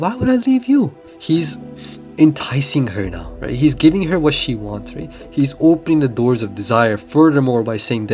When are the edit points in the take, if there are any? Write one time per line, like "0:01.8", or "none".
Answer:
0:01.1